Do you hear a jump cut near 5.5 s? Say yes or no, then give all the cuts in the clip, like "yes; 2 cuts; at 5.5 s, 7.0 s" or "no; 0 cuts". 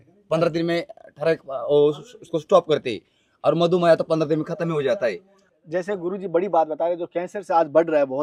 no; 0 cuts